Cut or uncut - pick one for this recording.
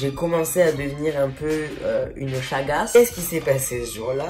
cut